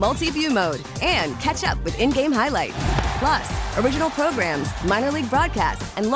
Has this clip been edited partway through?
no; 0 cuts

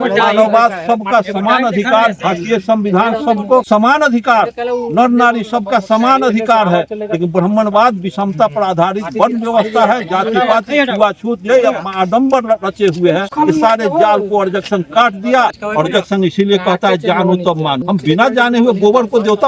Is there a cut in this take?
yes; 4 cuts; at 3.6 s, 13.3 s, 15.6 s, 17.8 s

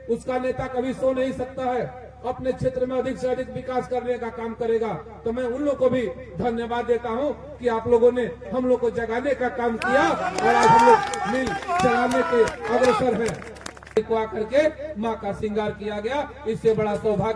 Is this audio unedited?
no; 1 cut; at 14.0 s

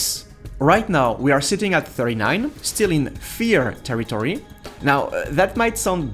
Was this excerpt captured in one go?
yes; 0 cuts

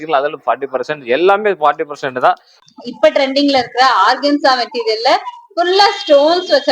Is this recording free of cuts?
no; 1 cut; at 2.5 s

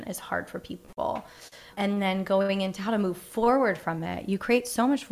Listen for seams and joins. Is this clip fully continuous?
no; 1 cut; at 1.7 s

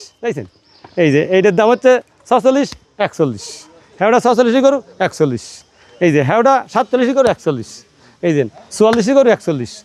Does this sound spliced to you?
no; 0 cuts

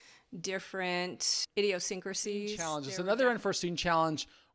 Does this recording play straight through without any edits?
no; 2 cuts; at 1.3 s, 2.9 s

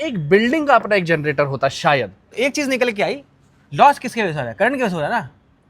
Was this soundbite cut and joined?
yes; 1 cut; at 2.2 s

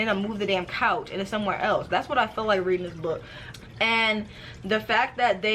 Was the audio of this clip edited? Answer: yes; 1 cut; at 3.3 s

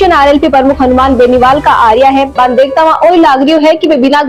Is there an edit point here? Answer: no; 0 cuts

